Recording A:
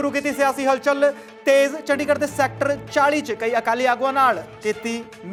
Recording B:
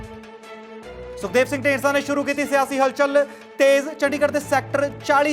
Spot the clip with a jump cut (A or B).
B